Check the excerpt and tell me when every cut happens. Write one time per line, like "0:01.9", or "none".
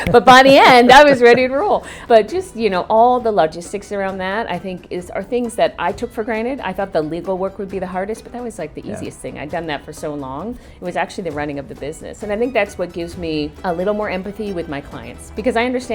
0:02.0
0:13.6